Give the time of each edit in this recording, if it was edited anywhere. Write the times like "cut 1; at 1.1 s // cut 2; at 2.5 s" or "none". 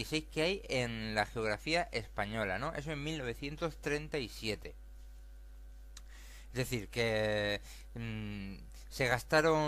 none